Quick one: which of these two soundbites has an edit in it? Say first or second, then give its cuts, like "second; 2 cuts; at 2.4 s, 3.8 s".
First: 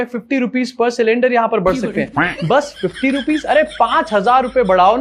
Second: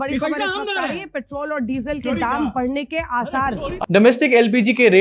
second; 1 cut; at 3.7 s